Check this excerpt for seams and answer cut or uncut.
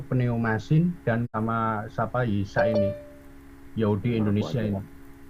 cut